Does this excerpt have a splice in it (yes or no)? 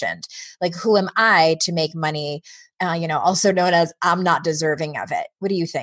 yes